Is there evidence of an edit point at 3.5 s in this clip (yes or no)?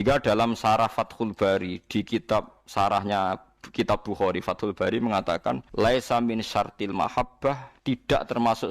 no